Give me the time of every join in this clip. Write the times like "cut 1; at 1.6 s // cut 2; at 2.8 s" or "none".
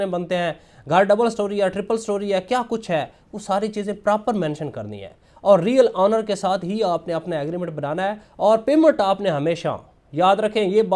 none